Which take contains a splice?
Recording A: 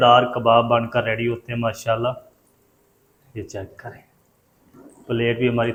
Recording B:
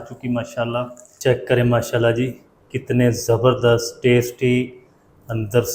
B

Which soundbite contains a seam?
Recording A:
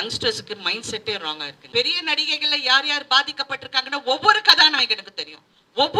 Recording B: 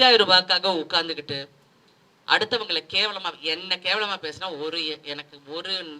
A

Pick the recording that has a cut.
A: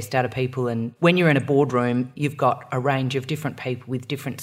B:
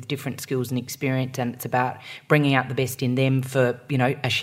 A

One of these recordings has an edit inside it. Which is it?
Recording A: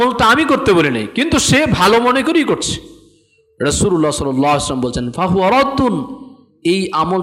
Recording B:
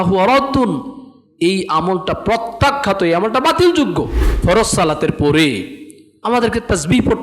B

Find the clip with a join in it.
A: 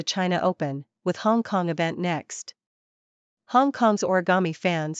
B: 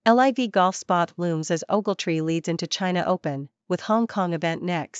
A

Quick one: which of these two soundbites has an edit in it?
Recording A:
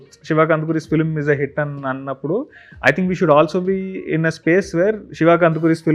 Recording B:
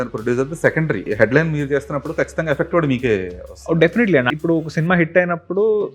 B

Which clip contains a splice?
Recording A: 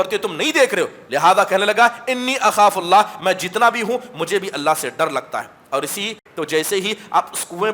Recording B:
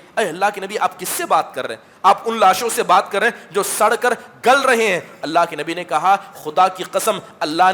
A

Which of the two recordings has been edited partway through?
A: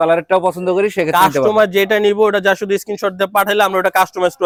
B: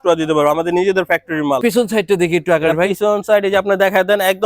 B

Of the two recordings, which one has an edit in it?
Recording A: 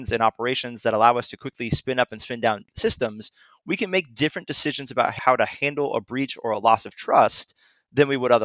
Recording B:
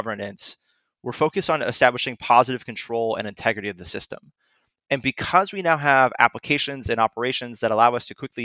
A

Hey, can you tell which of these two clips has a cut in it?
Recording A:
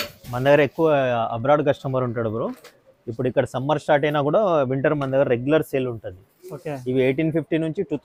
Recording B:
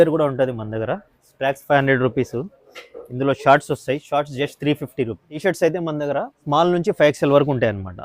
B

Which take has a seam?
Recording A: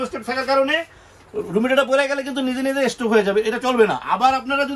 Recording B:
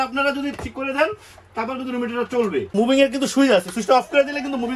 B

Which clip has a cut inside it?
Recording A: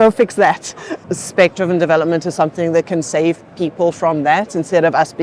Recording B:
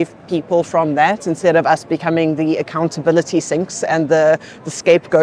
A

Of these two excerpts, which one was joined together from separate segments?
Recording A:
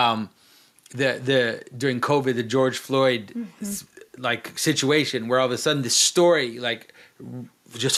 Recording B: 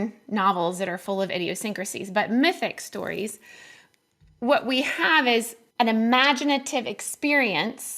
B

